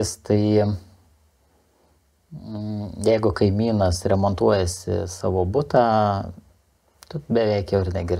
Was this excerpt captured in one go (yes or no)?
yes